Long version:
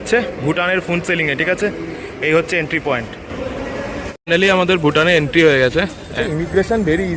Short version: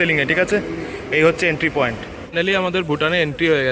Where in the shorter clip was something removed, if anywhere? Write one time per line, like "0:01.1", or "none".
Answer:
0:02.1